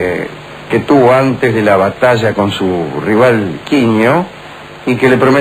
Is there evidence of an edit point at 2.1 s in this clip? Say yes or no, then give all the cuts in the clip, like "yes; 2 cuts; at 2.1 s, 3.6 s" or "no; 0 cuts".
no; 1 cut; at 4.2 s